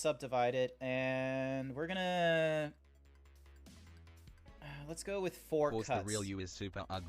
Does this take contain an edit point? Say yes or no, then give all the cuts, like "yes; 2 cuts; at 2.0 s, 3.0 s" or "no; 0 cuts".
yes; 2 cuts; at 0.9 s, 4.3 s